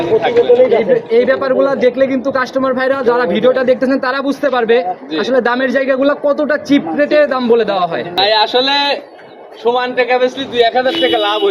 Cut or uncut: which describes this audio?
uncut